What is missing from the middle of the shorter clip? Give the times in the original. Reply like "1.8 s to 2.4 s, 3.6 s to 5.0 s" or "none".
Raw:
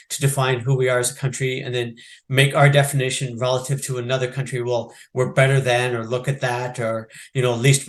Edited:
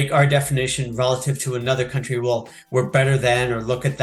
none